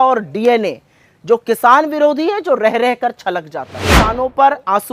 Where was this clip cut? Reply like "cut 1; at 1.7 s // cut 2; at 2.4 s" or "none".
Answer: cut 1; at 3.8 s